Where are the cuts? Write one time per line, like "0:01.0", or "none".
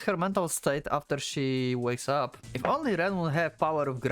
0:02.4